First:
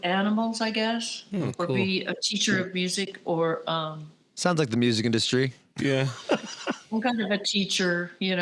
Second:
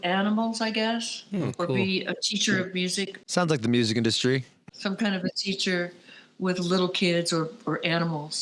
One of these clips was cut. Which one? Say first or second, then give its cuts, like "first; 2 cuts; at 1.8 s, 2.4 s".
second; 2 cuts; at 3.1 s, 4.7 s